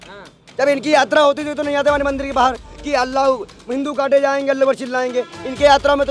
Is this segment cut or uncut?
uncut